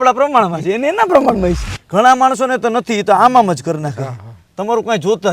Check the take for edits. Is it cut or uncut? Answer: cut